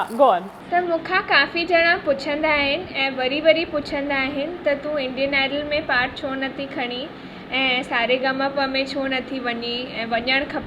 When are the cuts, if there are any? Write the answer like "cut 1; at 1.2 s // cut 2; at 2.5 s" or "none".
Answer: none